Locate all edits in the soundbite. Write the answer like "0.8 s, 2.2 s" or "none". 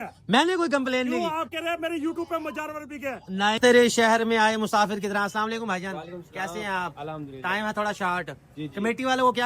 3.6 s